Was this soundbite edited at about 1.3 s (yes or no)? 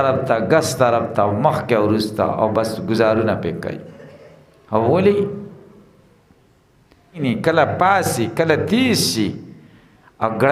no